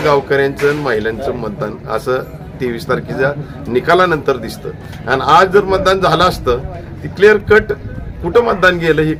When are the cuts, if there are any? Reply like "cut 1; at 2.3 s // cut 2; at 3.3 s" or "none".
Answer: none